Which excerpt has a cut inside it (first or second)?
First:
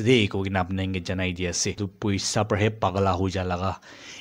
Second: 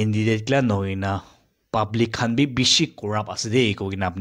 first